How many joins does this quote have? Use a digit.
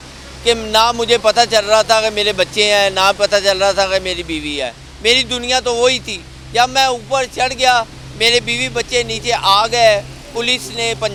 0